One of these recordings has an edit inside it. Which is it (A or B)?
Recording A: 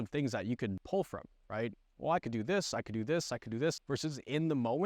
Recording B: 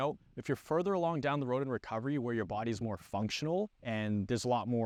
A